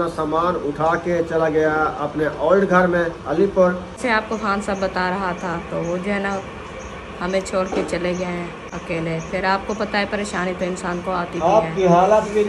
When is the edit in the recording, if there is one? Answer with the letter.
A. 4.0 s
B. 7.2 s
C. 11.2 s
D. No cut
A